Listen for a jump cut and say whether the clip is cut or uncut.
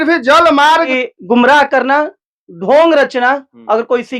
cut